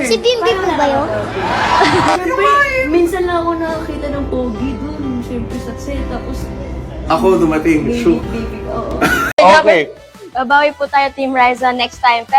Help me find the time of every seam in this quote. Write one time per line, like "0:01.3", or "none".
0:09.4